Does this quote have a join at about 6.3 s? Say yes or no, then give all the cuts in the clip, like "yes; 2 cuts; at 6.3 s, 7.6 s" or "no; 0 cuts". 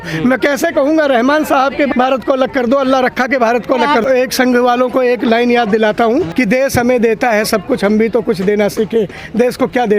yes; 3 cuts; at 1.9 s, 4.0 s, 6.3 s